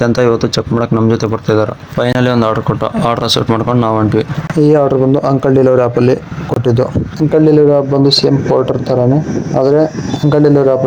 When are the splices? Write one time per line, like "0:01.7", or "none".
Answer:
none